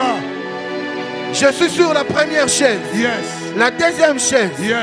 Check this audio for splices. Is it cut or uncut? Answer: uncut